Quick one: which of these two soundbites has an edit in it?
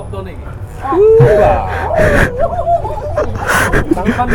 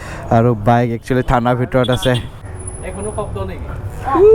second; 1 cut; at 2.3 s

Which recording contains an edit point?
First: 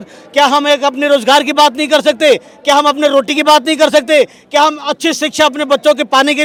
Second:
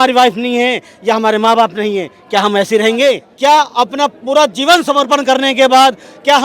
second; 1 cut; at 3.3 s

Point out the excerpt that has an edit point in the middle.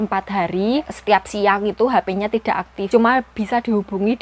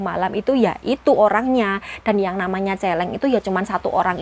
first; 2 cuts; at 0.9 s, 2.7 s

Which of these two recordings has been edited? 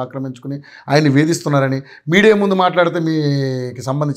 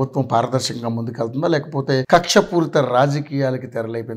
second; 1 cut; at 2.1 s

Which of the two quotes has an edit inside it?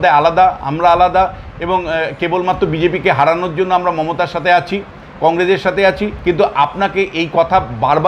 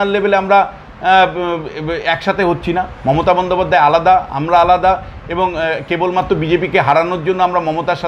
first; 1 cut; at 6.1 s

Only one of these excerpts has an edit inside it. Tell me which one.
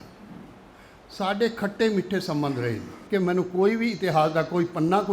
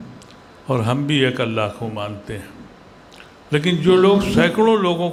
first; 1 cut; at 2.9 s

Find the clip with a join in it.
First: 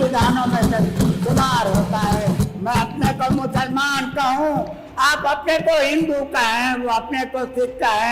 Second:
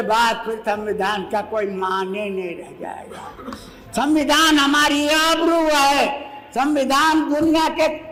first; 1 cut; at 2.4 s

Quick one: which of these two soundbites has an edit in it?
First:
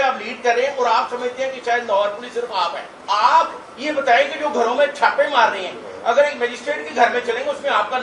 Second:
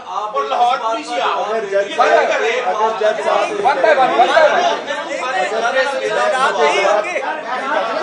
first; 1 cut; at 2.9 s

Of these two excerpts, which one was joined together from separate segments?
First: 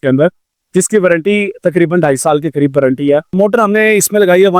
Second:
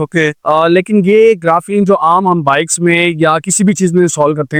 first; 1 cut; at 3.3 s

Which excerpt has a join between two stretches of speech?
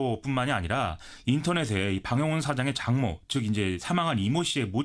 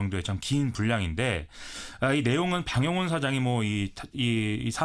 first; 1 cut; at 2.8 s

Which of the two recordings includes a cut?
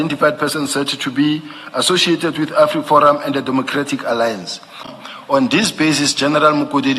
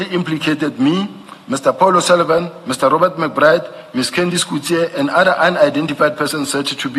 first; 1 cut; at 4.9 s

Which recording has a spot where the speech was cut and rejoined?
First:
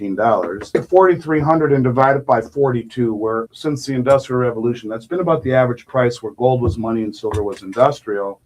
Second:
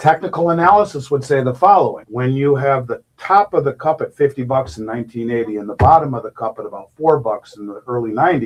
first; 2 cuts; at 0.7 s, 3.5 s

